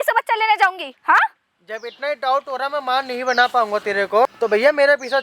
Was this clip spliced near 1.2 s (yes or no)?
no